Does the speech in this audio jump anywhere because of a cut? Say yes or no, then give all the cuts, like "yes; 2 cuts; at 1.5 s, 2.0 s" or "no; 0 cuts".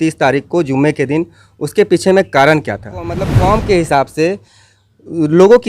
yes; 1 cut; at 3.3 s